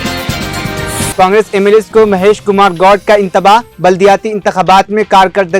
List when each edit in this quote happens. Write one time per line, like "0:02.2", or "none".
0:01.1

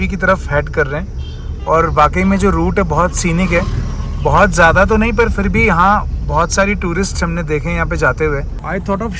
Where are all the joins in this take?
none

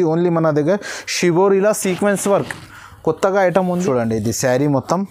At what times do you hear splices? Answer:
0:03.8

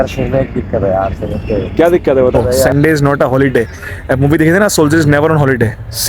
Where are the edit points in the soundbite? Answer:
0:02.7

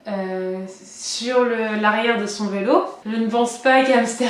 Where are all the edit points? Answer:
0:03.0

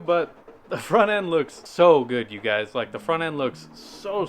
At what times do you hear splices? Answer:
0:01.6

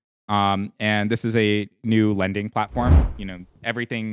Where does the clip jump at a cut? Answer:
0:03.0

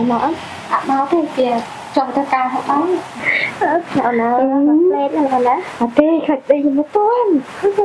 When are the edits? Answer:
0:03.1

